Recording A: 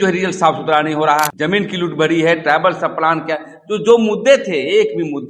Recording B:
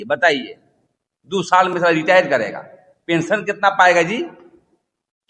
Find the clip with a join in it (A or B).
A